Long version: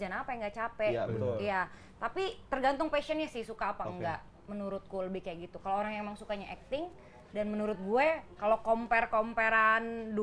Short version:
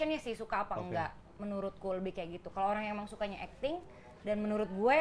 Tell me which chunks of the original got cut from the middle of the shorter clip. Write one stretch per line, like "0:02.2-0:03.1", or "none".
none